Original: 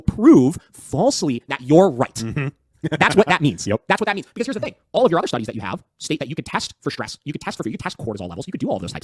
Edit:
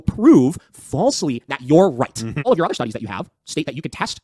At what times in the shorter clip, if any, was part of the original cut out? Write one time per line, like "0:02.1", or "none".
0:02.5